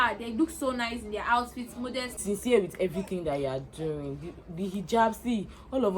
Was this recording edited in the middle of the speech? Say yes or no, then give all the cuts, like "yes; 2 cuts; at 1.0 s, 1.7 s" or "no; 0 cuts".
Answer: yes; 1 cut; at 2.2 s